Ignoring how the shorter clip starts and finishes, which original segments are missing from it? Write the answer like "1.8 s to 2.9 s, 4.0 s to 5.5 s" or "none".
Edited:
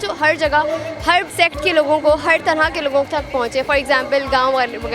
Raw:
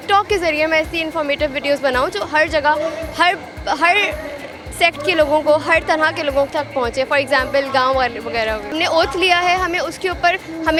3.4 s to 4.7 s